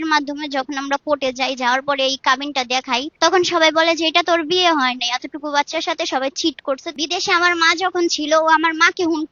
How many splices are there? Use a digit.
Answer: 2